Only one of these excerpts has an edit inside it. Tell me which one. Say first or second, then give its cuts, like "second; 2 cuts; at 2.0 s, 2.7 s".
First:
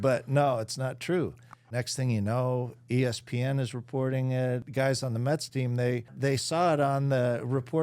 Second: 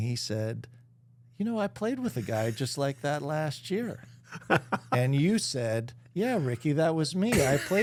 first; 3 cuts; at 1.8 s, 4.7 s, 6.1 s